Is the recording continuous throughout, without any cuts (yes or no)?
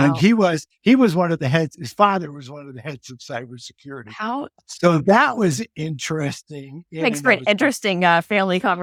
yes